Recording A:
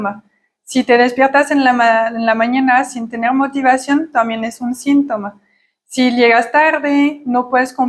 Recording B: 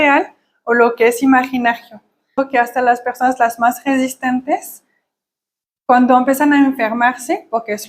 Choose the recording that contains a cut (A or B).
B